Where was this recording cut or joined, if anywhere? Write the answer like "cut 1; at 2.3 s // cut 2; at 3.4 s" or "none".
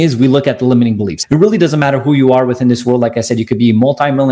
cut 1; at 1.1 s